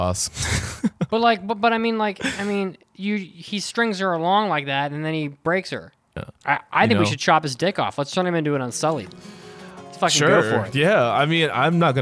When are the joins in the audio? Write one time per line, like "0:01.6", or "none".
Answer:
0:06.3